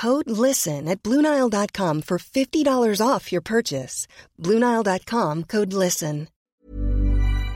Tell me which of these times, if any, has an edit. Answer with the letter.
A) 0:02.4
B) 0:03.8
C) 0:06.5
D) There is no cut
C